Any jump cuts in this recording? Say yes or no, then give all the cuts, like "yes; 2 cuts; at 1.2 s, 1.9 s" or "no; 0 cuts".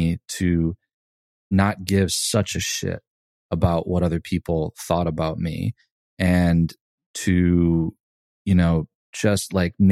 no; 0 cuts